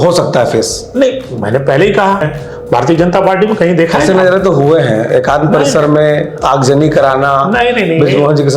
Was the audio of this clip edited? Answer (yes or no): yes